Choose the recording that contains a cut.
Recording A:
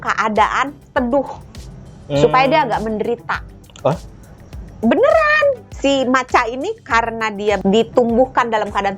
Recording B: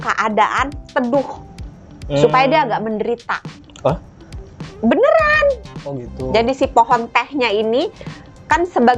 A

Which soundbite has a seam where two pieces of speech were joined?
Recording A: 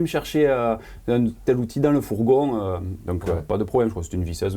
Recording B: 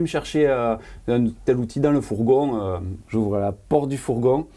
B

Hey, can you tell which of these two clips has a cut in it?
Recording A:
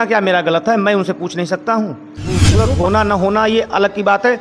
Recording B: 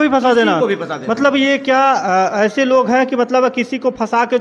A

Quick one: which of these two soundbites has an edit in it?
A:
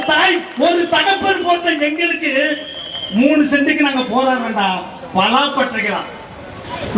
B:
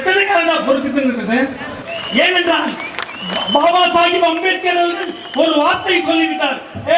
B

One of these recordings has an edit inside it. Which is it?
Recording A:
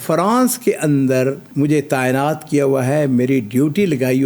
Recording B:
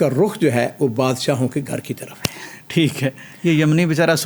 A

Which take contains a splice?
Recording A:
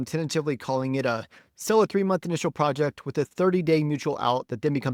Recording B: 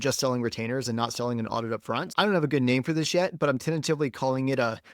B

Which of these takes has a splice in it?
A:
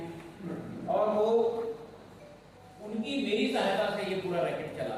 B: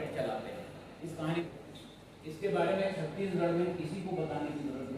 B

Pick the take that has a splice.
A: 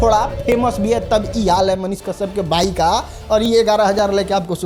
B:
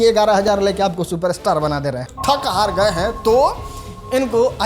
B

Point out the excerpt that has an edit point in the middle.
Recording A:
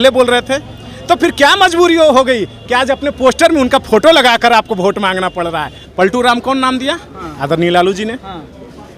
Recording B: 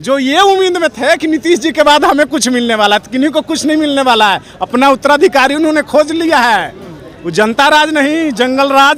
A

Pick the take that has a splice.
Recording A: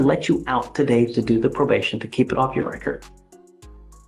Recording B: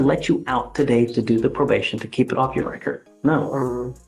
B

